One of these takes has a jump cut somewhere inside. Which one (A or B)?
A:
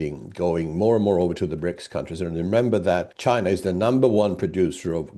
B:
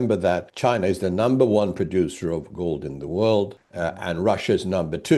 B